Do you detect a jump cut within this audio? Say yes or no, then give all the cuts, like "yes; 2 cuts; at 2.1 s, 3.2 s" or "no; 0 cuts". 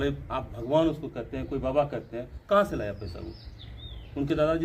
no; 0 cuts